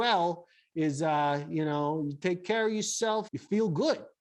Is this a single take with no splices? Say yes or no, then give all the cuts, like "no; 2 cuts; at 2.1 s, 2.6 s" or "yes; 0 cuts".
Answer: no; 1 cut; at 3.3 s